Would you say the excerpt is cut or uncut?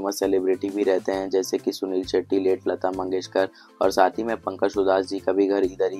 uncut